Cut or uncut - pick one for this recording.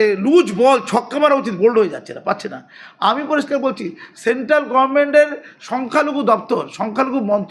uncut